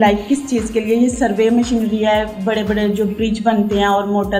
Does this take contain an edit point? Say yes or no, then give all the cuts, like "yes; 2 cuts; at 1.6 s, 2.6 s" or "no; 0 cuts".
no; 0 cuts